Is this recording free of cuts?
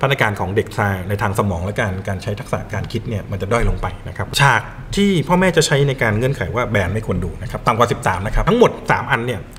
no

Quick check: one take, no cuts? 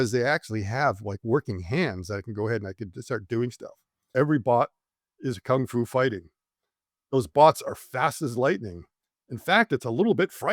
no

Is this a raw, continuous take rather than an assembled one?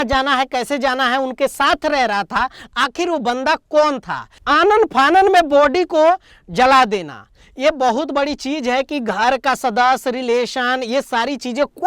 no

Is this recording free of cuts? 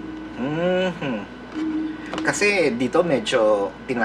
yes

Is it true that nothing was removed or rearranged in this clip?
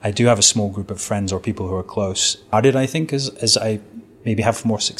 no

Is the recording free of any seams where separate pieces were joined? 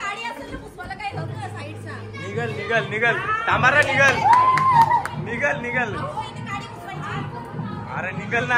yes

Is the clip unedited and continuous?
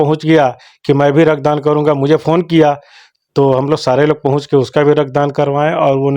yes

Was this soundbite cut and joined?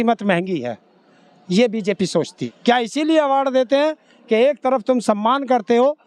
yes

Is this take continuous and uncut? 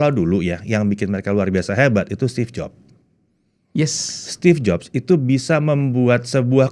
yes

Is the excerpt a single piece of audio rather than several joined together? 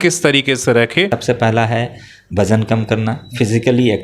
no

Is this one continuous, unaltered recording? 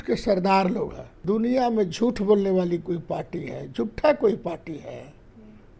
no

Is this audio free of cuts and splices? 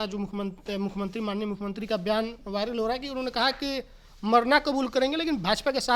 yes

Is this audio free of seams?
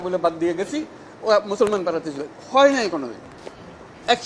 yes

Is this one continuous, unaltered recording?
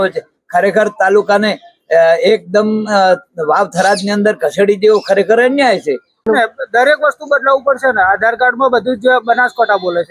no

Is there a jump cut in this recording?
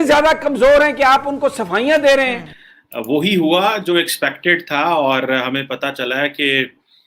yes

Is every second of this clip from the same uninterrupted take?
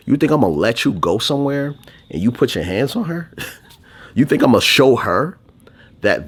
yes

